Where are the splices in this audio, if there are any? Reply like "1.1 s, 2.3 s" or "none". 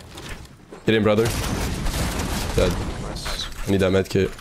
none